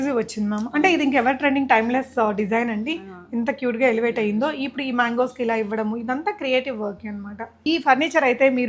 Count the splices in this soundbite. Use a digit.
1